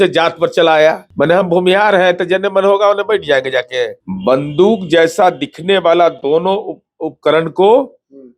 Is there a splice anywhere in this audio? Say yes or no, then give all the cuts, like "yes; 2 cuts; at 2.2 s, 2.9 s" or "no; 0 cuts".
yes; 2 cuts; at 1.1 s, 4.0 s